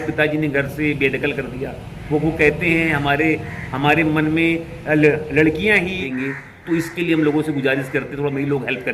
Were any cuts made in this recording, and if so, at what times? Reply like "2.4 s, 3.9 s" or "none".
6.1 s